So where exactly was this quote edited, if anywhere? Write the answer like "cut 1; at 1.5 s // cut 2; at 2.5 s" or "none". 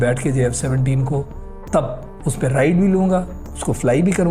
none